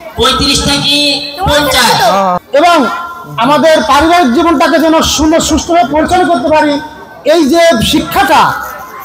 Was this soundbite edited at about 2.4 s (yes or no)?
yes